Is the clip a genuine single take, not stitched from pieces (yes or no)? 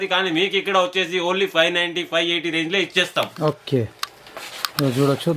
yes